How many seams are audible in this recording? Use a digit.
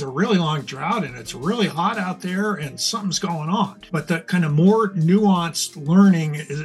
1